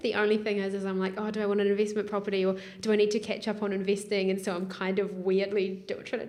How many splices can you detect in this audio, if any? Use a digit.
0